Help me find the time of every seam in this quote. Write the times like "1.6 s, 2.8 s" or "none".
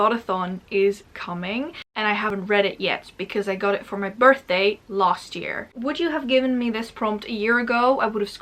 2.1 s, 5.7 s